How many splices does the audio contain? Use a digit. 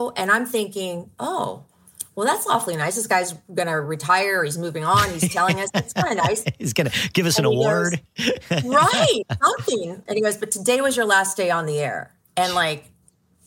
1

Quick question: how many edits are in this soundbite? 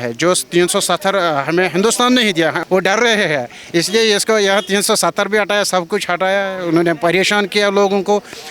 1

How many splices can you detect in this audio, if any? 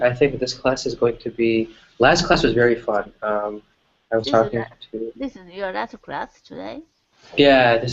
1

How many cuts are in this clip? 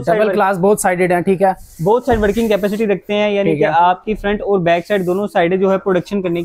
0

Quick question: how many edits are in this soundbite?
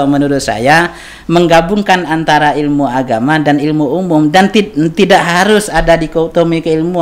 0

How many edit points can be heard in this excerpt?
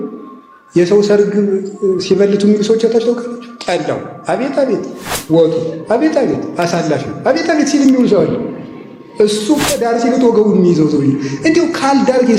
0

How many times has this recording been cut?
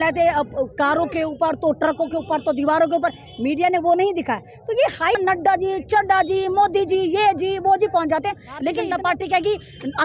2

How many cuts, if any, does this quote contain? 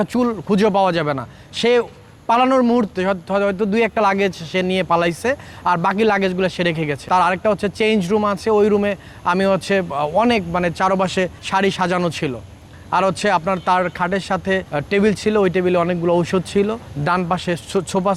4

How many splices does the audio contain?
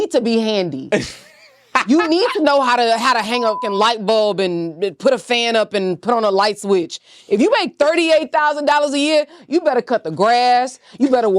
1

